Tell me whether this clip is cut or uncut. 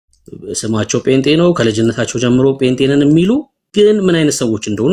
uncut